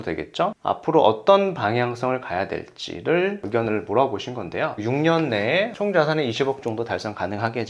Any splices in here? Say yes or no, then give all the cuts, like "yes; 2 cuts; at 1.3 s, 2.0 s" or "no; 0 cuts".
yes; 2 cuts; at 4.7 s, 5.7 s